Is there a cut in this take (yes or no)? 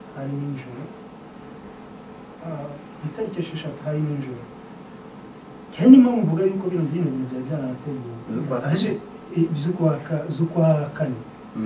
no